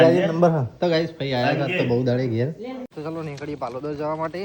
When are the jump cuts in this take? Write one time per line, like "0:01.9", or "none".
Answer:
0:02.9